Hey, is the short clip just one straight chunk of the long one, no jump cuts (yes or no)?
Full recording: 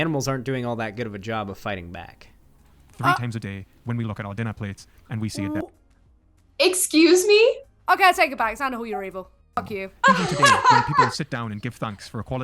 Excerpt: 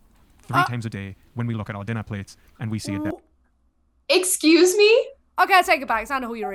yes